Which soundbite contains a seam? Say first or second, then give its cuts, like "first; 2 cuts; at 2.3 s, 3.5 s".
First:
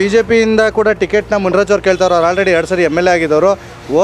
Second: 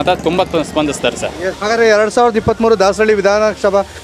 second; 1 cut; at 1.6 s